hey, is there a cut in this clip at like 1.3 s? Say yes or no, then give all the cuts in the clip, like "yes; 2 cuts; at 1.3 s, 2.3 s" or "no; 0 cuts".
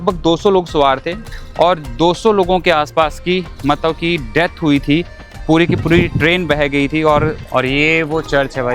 yes; 2 cuts; at 1.3 s, 7.4 s